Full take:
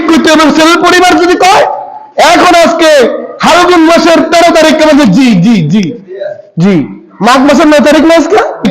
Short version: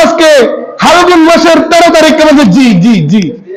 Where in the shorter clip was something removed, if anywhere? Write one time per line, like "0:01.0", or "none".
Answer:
none